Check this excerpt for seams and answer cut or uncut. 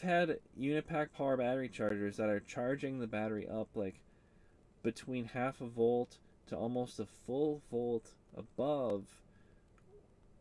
uncut